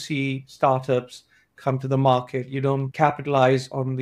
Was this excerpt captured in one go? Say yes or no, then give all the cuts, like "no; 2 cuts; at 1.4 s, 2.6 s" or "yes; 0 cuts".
no; 1 cut; at 2.9 s